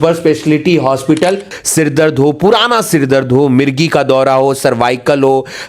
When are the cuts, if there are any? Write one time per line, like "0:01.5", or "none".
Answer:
0:01.5